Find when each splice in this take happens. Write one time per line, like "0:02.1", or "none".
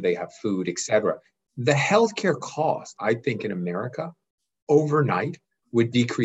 0:02.9

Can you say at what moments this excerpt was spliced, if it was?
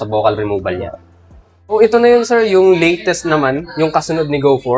0:01.7

